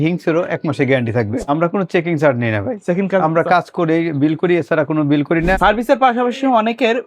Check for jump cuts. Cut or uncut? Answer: cut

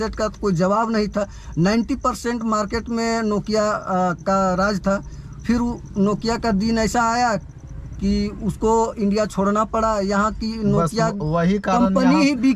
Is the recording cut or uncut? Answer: uncut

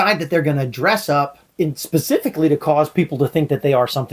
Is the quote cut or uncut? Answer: cut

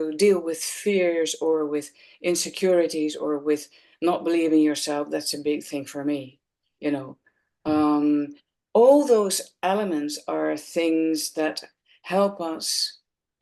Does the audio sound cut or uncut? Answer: uncut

